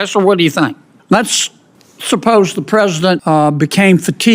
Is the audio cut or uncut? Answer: cut